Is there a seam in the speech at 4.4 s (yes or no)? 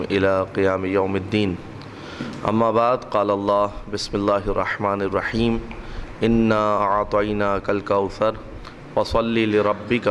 yes